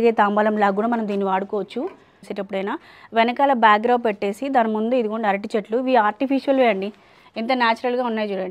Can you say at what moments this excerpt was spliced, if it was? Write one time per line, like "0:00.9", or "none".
0:02.4